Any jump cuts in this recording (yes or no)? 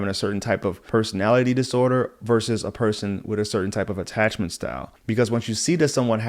yes